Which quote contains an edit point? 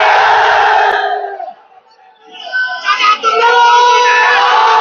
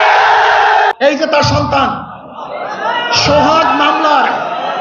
second; 1 cut; at 0.9 s

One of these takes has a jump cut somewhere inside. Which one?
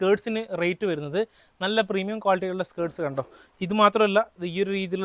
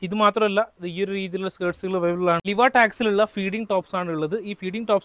second; 1 cut; at 2.4 s

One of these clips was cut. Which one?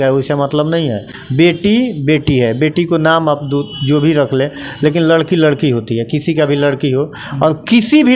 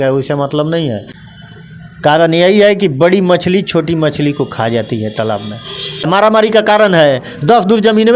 second; 2 cuts; at 1.1 s, 6.1 s

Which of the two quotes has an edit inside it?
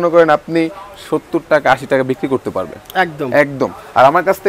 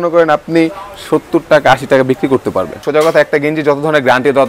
second; 1 cut; at 2.8 s

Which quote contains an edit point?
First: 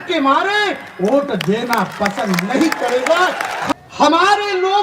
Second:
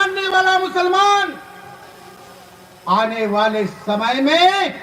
first; 1 cut; at 3.7 s

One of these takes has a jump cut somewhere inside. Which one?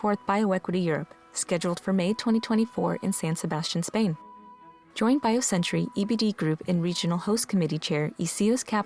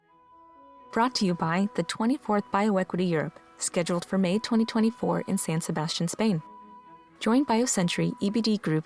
second; 1 cut; at 0.9 s

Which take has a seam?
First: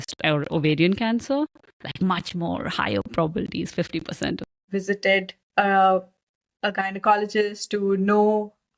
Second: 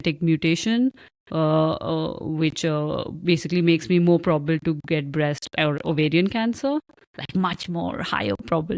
first; 1 cut; at 4.6 s

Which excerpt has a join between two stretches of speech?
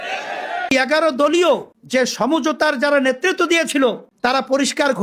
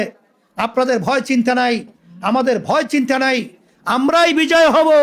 first; 2 cuts; at 0.7 s, 1.7 s

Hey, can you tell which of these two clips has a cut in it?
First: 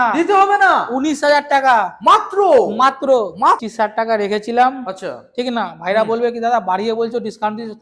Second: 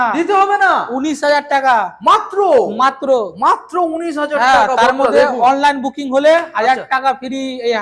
first; 1 cut; at 3.7 s

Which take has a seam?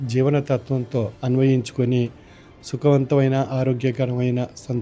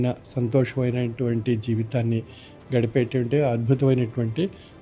first; 1 cut; at 1.2 s

